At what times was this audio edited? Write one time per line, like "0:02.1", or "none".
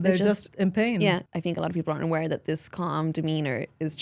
0:01.2